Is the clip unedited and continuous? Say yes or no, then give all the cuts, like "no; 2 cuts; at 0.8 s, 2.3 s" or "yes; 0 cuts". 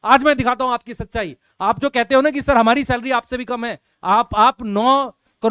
yes; 0 cuts